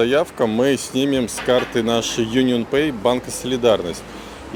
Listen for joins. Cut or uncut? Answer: uncut